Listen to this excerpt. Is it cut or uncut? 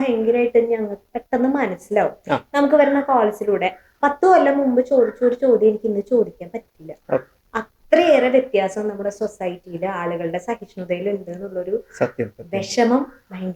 uncut